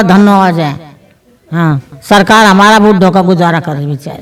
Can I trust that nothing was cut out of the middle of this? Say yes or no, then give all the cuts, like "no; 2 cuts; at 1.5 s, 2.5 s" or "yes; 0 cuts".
yes; 0 cuts